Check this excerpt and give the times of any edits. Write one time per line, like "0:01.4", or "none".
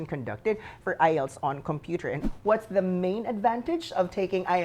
0:02.2